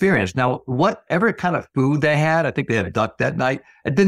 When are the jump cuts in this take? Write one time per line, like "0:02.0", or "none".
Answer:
none